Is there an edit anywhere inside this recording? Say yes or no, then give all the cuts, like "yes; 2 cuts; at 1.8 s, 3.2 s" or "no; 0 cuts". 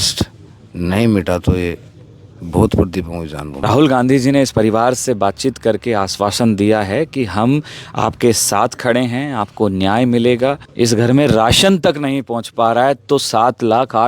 yes; 2 cuts; at 3.6 s, 10.7 s